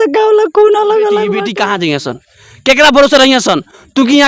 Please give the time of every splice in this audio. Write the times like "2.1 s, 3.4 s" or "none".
1.5 s